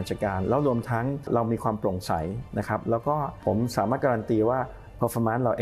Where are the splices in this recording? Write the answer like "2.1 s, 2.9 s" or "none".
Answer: 1.3 s, 3.3 s